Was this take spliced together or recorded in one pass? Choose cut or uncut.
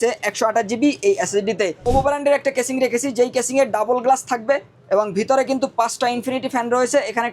cut